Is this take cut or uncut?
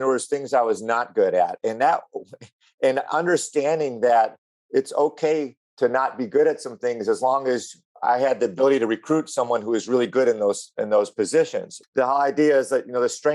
cut